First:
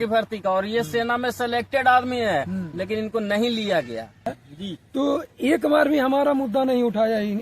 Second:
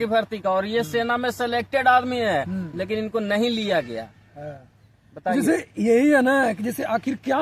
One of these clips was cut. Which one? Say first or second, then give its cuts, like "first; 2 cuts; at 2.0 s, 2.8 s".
first; 1 cut; at 4.2 s